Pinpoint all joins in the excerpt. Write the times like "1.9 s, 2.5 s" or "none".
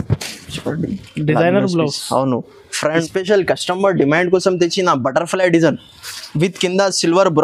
3.0 s